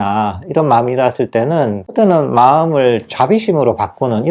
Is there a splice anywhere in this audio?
yes; 1 cut; at 1.8 s

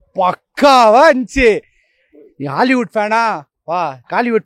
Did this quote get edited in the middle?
no; 0 cuts

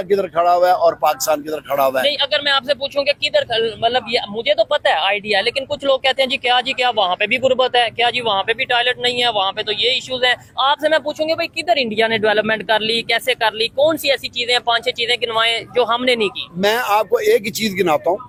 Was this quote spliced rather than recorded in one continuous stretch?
no; 0 cuts

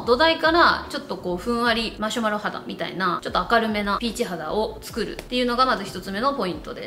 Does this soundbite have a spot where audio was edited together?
no; 0 cuts

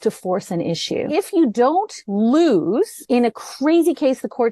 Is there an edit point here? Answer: yes; 3 cuts; at 1.1 s, 2.0 s, 3.0 s

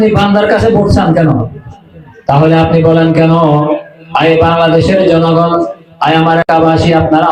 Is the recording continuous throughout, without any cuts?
yes; 0 cuts

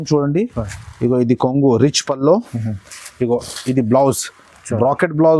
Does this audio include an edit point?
no; 0 cuts

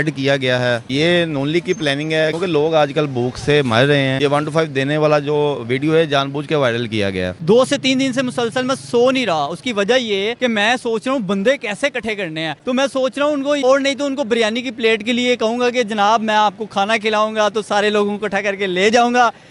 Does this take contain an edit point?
yes; 6 cuts; at 2.3 s, 4.1 s, 7.3 s, 10.3 s, 12.5 s, 13.6 s

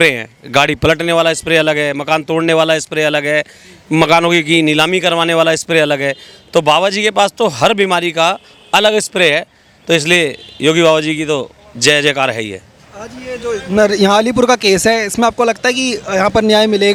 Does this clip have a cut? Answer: no; 0 cuts

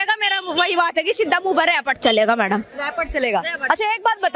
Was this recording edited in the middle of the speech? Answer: no; 0 cuts

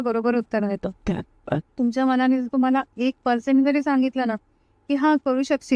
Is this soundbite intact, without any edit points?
yes; 0 cuts

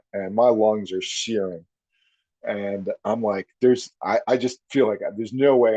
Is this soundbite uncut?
yes; 0 cuts

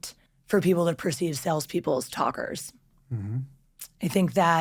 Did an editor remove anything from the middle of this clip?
no; 0 cuts

